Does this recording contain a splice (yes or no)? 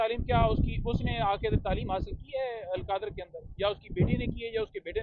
no